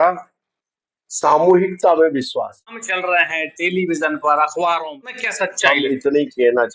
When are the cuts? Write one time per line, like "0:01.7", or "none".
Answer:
0:02.9
0:05.2